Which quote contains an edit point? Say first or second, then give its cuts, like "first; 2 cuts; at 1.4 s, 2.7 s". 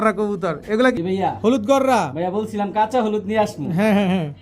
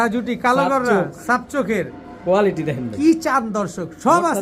first; 1 cut; at 1.0 s